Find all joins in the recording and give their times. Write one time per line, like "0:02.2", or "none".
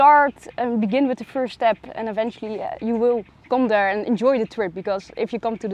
none